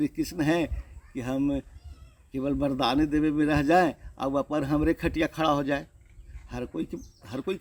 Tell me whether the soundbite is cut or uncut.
uncut